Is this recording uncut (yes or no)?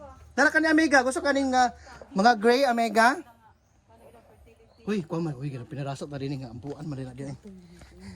yes